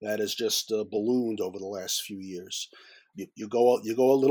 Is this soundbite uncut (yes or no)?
no